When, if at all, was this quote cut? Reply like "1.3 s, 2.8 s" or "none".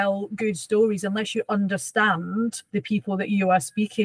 2.6 s